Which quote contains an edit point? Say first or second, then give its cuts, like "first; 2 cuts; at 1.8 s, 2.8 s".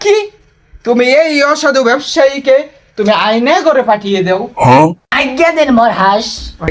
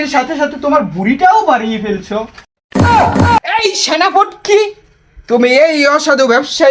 second; 1 cut; at 3.4 s